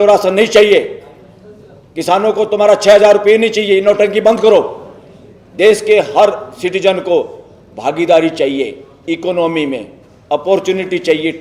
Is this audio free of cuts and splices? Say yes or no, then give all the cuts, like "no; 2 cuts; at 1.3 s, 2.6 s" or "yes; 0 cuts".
yes; 0 cuts